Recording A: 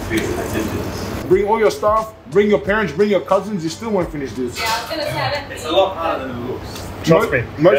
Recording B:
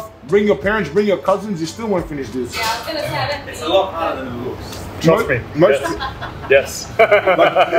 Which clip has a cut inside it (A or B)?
A